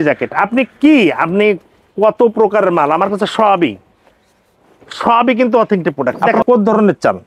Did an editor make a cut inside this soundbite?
yes; 1 cut; at 6.1 s

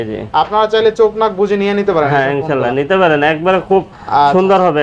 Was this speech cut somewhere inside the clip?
no; 0 cuts

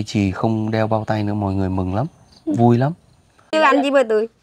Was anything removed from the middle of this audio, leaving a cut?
yes; 1 cut; at 3.5 s

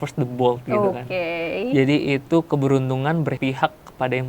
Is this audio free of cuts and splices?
no; 1 cut; at 3.4 s

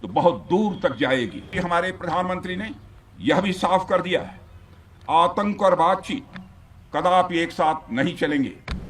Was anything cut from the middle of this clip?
yes; 1 cut; at 1.5 s

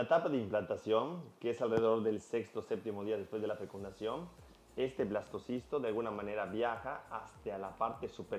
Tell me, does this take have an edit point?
no; 0 cuts

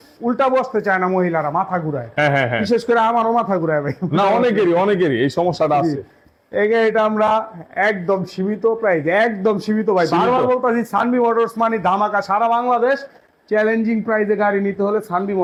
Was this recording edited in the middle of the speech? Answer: no; 0 cuts

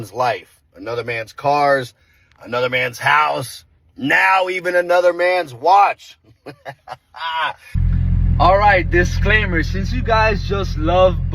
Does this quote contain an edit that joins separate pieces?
yes; 1 cut; at 7.7 s

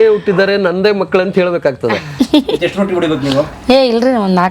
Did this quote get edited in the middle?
yes; 1 cut; at 2.1 s

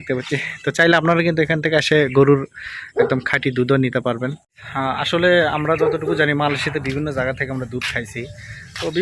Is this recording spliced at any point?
no; 0 cuts

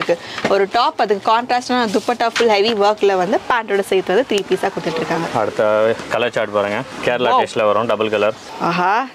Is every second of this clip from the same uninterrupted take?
yes; 0 cuts

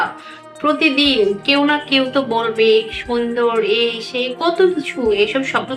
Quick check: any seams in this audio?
no; 0 cuts

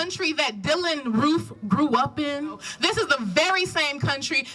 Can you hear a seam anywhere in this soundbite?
yes; 1 cut; at 2.7 s

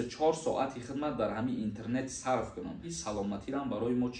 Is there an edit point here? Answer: yes; 1 cut; at 3.0 s

